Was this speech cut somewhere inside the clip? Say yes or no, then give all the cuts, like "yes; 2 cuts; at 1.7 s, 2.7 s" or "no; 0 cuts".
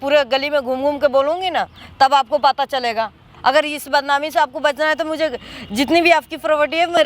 no; 0 cuts